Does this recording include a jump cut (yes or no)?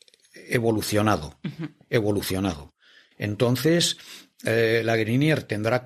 no